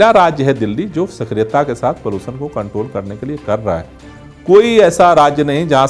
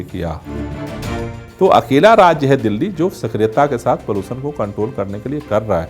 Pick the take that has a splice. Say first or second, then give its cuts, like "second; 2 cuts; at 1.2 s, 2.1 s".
second; 1 cut; at 1.0 s